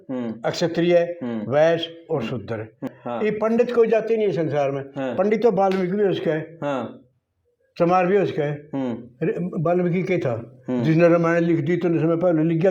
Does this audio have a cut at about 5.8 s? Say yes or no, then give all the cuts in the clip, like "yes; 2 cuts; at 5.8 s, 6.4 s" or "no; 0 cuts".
no; 1 cut; at 2.9 s